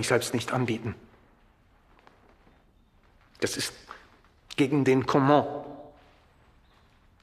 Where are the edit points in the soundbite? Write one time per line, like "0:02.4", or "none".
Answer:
none